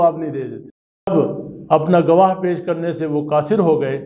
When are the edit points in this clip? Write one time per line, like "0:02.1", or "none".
0:01.1